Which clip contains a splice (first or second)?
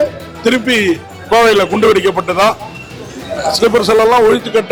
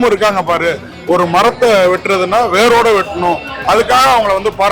second